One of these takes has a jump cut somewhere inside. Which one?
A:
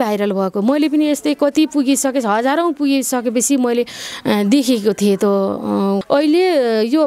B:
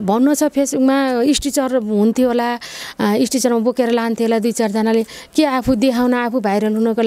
A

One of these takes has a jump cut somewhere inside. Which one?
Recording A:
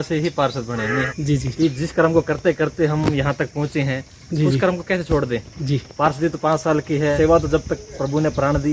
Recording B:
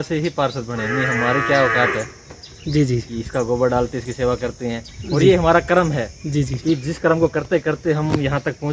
A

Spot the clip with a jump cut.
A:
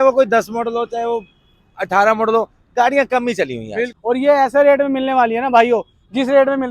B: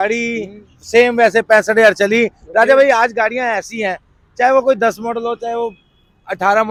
A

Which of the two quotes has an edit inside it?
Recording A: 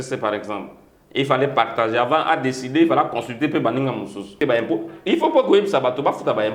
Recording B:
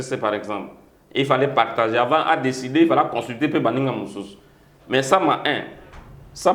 A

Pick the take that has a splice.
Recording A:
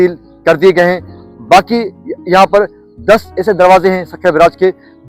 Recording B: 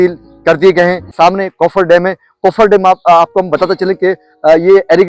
B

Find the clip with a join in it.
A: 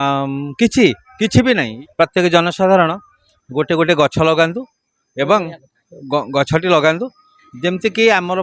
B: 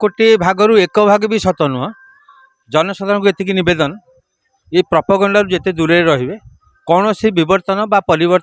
A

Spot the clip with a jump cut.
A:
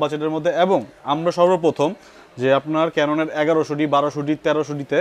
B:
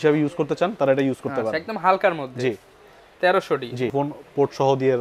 B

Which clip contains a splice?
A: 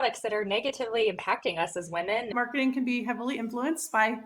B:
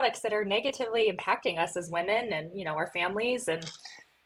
A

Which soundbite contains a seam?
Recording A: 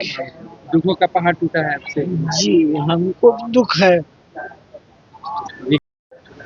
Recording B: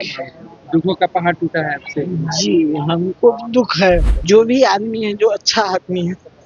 B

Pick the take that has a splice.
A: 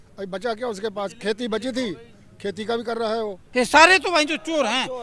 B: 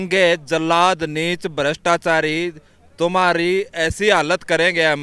A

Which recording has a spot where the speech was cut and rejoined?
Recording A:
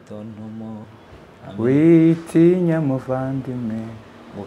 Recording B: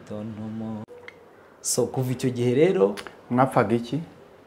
B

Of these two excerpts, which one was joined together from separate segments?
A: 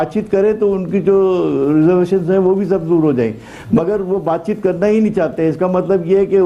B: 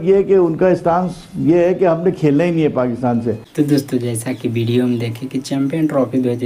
B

